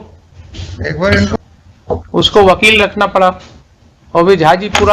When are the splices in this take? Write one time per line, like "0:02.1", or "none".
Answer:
0:01.3